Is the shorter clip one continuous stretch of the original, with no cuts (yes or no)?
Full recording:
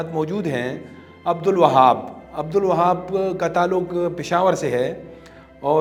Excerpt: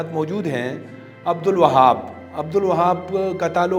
yes